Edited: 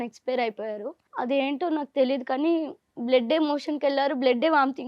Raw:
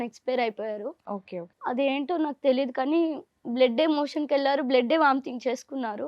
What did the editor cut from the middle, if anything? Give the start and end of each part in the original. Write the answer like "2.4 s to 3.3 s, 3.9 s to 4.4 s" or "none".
1.0 s to 1.5 s